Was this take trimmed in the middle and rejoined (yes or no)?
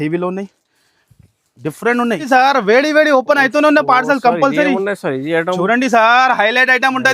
yes